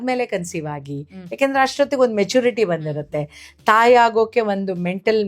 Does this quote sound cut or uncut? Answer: uncut